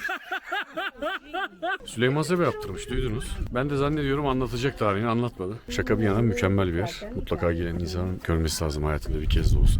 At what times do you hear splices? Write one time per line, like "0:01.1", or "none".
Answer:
0:01.8